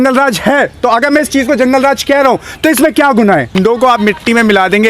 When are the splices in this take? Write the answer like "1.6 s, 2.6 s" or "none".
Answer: 3.5 s